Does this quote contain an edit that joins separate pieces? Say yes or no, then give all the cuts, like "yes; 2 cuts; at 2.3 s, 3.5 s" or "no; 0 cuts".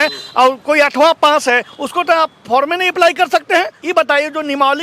yes; 1 cut; at 3.8 s